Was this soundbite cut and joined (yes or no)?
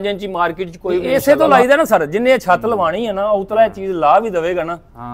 yes